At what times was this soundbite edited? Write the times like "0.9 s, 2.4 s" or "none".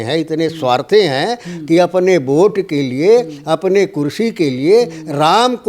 none